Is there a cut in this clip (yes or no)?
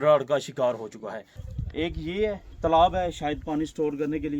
yes